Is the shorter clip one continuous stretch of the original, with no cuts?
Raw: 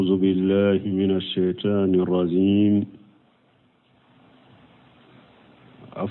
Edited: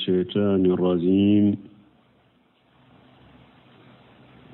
yes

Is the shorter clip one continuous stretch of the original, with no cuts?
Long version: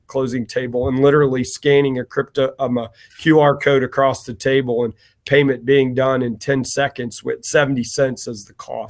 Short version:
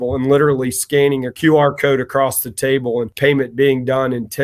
no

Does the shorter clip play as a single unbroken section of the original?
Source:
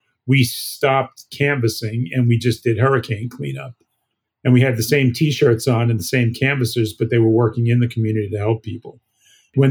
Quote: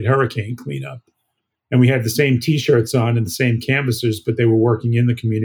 yes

